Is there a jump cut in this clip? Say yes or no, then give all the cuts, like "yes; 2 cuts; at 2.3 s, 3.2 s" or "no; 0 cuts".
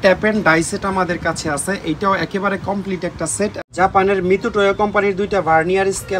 yes; 1 cut; at 3.5 s